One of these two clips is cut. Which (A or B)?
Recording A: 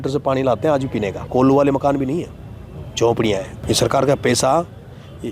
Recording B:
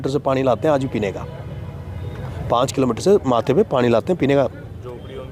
A